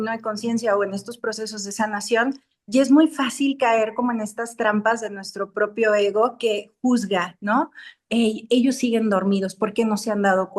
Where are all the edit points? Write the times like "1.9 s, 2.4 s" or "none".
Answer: none